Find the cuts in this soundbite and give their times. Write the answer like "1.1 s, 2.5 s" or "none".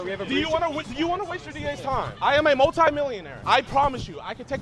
3.3 s